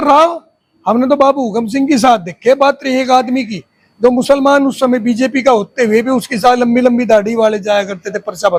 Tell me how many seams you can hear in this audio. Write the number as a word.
zero